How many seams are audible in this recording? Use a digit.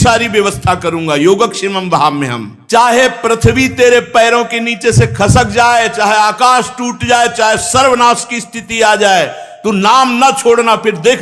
1